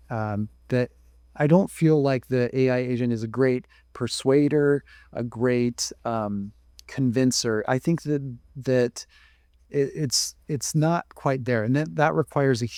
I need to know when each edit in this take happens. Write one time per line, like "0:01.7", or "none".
none